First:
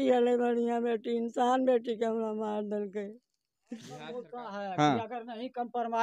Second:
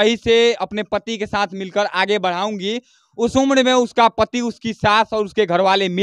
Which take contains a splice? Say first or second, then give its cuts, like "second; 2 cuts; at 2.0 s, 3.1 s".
first; 1 cut; at 4.2 s